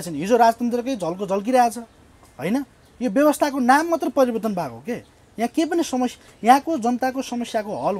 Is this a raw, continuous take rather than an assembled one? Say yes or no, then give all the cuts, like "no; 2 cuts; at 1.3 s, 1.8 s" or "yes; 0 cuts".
yes; 0 cuts